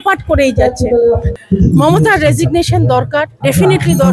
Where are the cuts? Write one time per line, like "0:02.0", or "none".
0:01.3